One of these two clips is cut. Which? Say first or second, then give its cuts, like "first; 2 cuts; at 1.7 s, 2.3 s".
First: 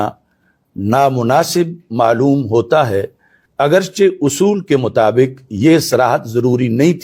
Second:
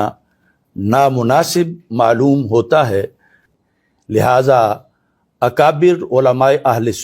second; 1 cut; at 3.5 s